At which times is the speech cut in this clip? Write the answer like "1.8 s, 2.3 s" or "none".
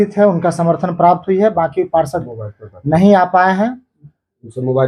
none